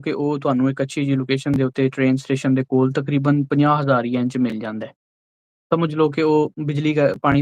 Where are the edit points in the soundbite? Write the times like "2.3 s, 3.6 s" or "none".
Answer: none